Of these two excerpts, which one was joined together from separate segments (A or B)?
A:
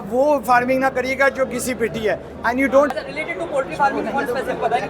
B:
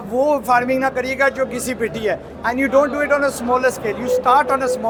A